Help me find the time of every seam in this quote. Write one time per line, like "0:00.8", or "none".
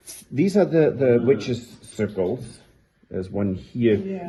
none

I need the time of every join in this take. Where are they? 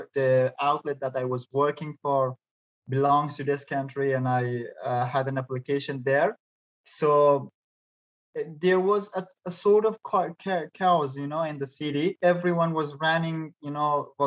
none

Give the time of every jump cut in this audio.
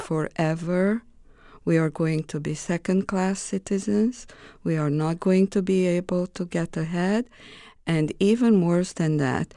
none

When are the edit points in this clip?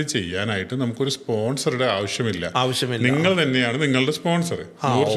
none

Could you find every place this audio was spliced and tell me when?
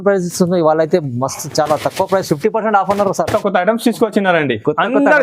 0:03.4

